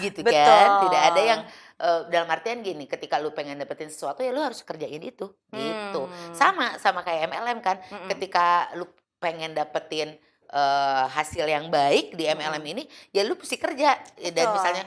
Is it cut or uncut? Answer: uncut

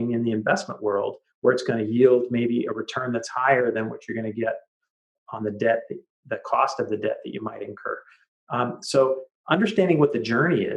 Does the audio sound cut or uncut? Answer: uncut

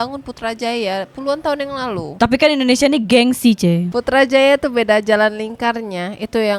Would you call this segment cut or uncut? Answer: uncut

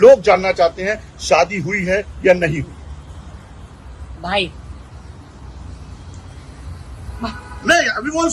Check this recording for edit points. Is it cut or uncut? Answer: uncut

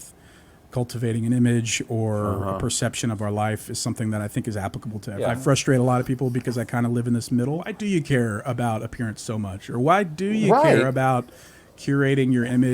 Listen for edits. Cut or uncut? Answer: cut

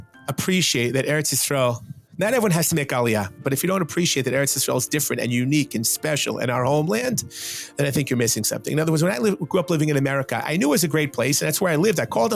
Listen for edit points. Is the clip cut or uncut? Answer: uncut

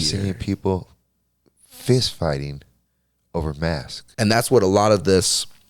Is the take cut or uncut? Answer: cut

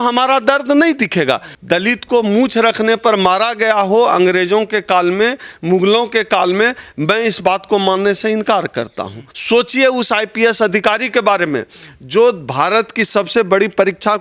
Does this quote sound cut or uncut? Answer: cut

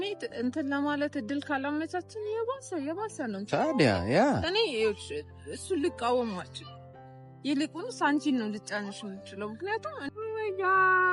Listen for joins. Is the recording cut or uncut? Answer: cut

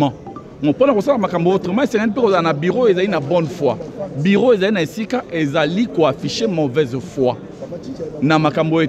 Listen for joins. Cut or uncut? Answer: uncut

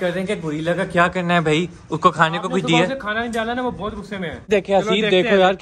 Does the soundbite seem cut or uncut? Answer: cut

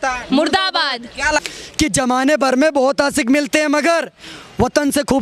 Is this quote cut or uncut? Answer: cut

